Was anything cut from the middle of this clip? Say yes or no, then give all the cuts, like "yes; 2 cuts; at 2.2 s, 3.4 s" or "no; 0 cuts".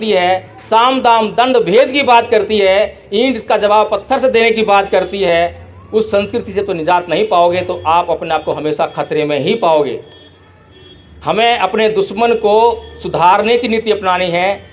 no; 0 cuts